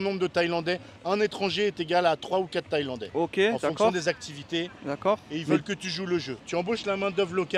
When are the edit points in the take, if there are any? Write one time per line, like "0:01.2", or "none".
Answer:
none